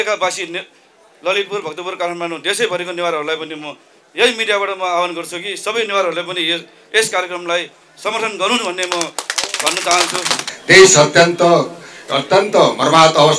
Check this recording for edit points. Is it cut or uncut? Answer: uncut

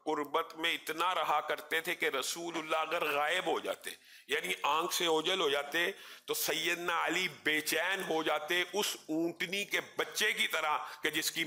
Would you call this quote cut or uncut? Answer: uncut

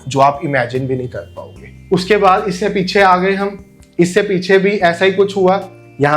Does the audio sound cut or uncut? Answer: uncut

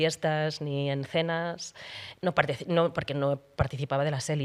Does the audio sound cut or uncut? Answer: uncut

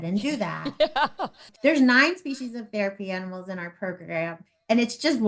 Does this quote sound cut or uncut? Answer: cut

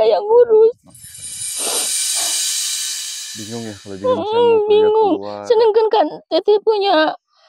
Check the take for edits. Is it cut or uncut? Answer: uncut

